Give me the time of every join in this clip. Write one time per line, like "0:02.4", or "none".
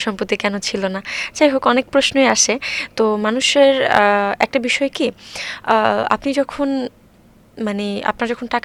none